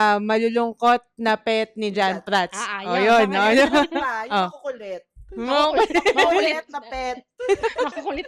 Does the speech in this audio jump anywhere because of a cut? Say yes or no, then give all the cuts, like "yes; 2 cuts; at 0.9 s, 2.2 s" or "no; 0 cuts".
no; 0 cuts